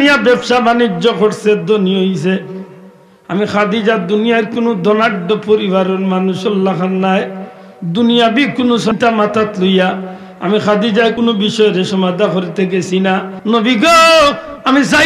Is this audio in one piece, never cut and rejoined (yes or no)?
no